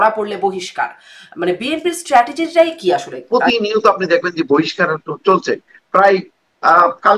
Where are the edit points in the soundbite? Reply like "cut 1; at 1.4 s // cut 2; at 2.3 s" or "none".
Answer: cut 1; at 3.1 s